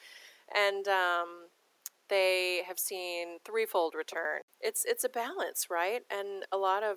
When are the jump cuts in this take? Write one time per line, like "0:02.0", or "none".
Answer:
0:04.5